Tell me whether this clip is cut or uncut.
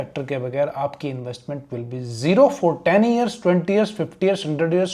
uncut